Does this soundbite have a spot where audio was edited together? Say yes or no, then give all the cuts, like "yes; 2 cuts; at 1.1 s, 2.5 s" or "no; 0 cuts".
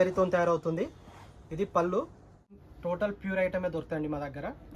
yes; 1 cut; at 2.7 s